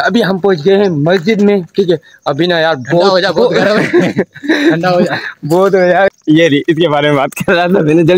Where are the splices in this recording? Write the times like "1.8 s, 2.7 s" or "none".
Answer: 6.1 s